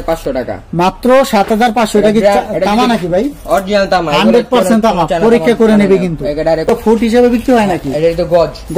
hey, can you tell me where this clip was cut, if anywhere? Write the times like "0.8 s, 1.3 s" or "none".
6.7 s